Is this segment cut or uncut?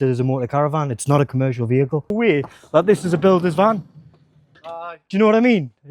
cut